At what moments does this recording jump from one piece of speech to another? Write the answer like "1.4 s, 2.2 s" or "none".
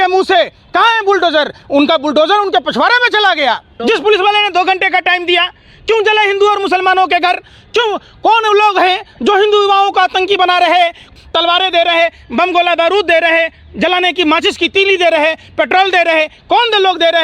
3.7 s, 11.1 s